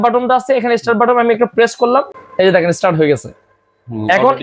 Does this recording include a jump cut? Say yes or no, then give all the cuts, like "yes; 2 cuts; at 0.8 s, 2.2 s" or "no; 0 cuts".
yes; 1 cut; at 2.2 s